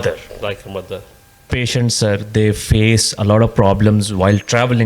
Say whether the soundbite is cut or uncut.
cut